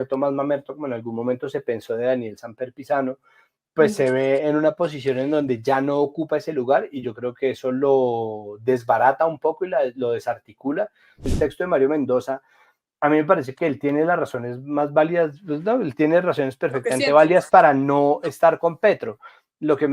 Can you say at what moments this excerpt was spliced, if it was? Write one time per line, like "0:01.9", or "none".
0:11.3